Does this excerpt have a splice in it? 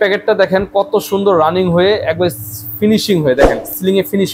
no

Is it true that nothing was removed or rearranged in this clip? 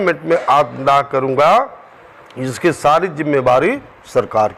yes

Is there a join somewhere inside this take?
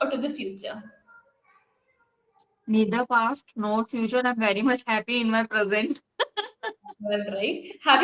no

